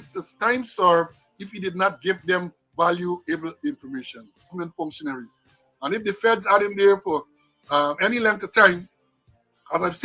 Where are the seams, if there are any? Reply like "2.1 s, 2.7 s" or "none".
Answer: 4.5 s